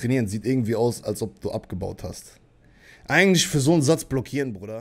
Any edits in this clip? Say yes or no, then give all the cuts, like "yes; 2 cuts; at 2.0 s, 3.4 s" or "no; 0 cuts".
no; 0 cuts